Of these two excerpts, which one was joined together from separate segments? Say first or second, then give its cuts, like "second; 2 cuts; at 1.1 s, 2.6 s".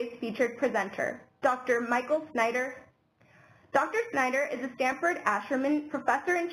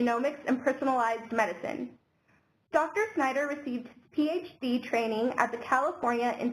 second; 1 cut; at 2.8 s